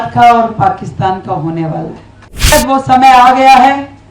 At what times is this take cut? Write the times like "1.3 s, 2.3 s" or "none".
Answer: 2.5 s

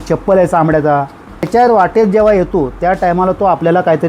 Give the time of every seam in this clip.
1.5 s

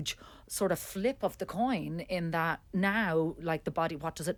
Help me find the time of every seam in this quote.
none

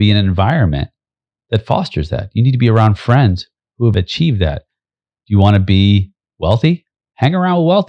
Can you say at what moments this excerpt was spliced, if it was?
3.9 s

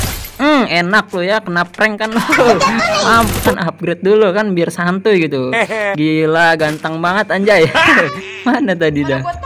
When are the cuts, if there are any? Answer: 3.5 s, 8.3 s

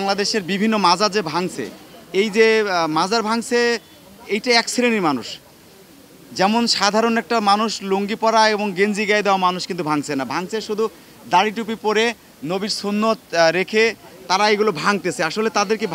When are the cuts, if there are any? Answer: none

